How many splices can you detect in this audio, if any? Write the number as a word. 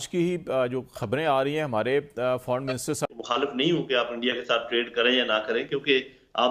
one